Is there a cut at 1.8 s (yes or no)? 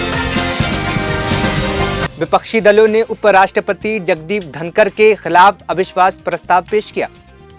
no